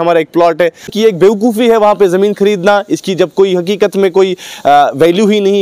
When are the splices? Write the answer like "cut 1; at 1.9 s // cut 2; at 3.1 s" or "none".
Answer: cut 1; at 0.9 s